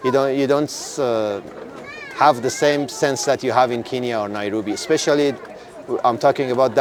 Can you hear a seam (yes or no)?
no